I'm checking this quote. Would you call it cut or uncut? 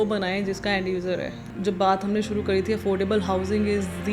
cut